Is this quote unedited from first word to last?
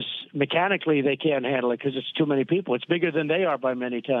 yes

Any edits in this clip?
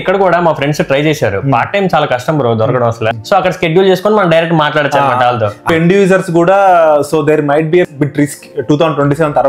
yes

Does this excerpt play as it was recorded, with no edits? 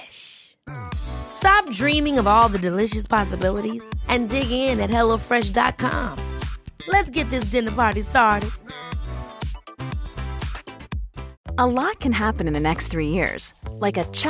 no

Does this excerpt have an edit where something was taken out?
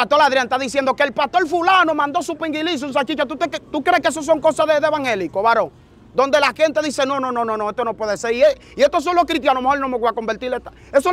no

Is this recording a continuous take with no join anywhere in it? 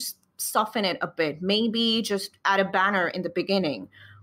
yes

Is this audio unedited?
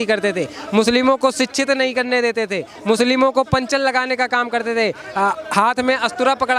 yes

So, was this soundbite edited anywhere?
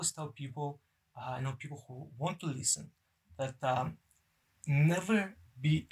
no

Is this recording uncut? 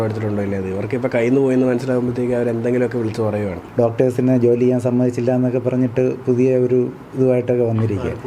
no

